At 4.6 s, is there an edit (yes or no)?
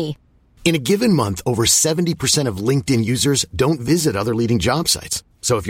no